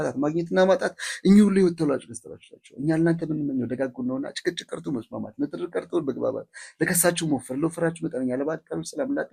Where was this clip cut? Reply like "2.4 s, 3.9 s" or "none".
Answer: none